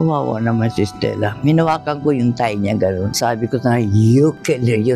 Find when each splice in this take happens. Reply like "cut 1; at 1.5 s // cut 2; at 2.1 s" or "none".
none